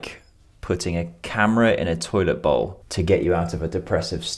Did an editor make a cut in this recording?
yes; 1 cut; at 2.8 s

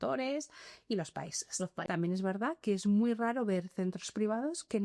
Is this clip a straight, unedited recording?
no; 1 cut; at 1.8 s

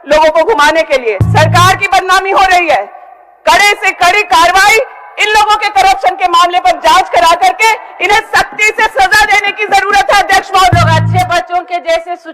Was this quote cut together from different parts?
yes; 2 cuts; at 1.2 s, 10.7 s

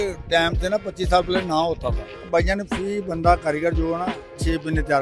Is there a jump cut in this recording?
yes; 1 cut; at 2.1 s

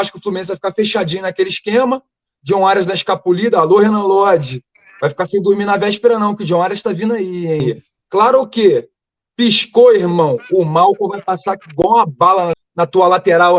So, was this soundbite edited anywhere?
yes; 2 cuts; at 7.6 s, 12.5 s

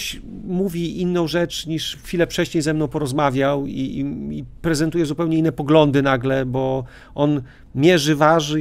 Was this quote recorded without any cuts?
yes; 0 cuts

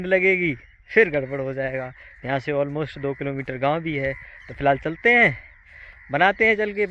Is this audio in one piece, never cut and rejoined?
yes; 0 cuts

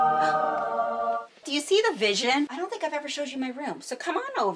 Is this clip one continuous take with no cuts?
no; 2 cuts; at 1.2 s, 2.6 s

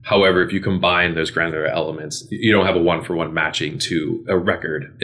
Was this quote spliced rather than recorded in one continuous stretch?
no; 0 cuts

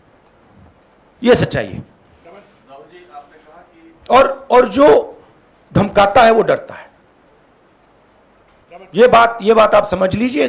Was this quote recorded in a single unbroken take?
yes; 0 cuts

